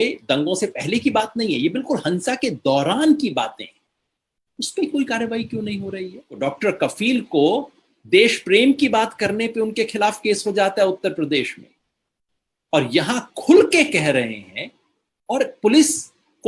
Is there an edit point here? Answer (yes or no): yes